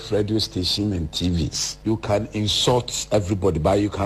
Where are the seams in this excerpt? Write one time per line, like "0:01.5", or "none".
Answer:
0:01.6